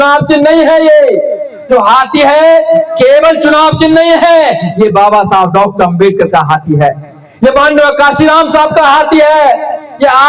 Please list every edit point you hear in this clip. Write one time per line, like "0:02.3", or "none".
none